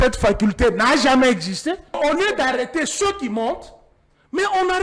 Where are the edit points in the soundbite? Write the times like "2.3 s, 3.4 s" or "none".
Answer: 2.0 s